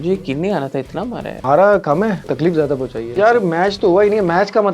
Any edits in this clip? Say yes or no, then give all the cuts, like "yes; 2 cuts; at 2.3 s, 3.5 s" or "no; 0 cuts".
yes; 2 cuts; at 1.3 s, 2.7 s